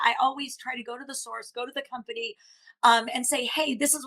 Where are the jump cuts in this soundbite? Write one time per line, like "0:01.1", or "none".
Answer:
none